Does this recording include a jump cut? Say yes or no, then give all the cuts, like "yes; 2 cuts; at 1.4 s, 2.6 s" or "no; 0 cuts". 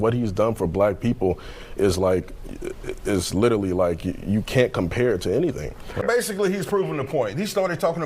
yes; 1 cut; at 6.0 s